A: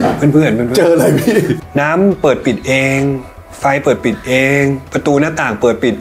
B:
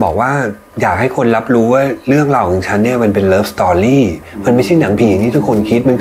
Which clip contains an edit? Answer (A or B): A